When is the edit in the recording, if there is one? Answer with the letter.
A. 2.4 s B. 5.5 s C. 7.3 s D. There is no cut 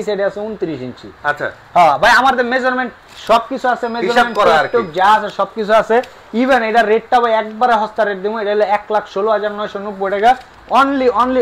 D